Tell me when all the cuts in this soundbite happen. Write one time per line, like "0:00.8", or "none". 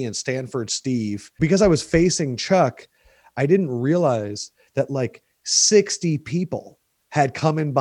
0:01.3